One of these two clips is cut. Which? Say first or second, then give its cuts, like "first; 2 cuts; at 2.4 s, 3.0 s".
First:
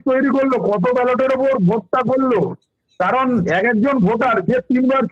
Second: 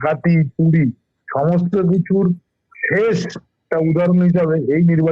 second; 1 cut; at 3.6 s